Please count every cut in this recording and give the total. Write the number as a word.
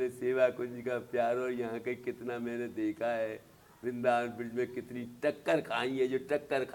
zero